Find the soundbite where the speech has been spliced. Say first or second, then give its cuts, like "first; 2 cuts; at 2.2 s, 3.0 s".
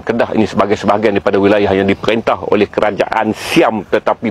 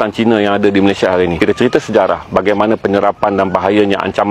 second; 1 cut; at 1.4 s